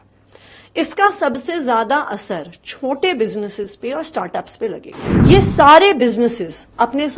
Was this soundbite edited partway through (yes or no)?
yes